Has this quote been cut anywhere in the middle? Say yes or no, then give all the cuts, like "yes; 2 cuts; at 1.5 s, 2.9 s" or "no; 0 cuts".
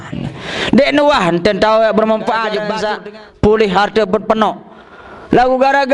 yes; 1 cut; at 2.7 s